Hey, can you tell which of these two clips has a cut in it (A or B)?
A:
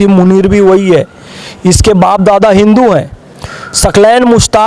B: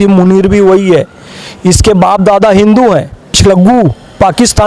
B